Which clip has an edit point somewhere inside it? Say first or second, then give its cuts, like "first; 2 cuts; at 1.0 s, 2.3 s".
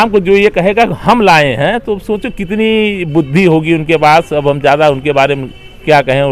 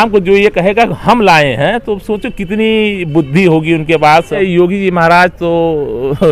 second; 1 cut; at 4.4 s